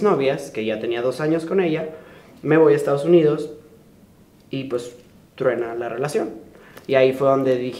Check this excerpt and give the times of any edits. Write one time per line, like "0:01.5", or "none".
none